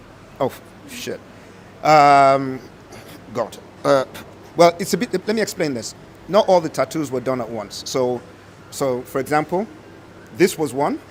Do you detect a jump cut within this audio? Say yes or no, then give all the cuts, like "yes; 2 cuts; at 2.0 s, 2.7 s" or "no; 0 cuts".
no; 0 cuts